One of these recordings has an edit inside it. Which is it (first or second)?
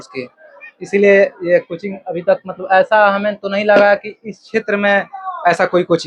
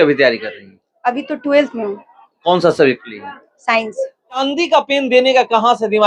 second